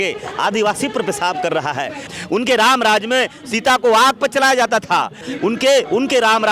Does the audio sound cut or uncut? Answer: cut